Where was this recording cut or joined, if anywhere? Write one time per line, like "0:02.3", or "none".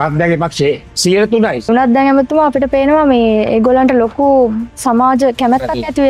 0:00.9
0:01.7